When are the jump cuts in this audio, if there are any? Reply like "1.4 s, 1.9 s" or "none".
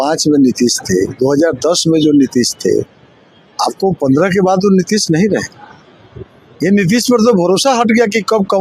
none